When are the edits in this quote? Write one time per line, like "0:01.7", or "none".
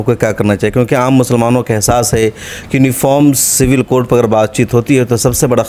none